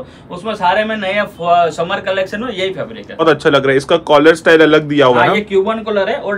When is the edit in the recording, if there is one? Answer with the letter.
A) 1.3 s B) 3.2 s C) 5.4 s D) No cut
B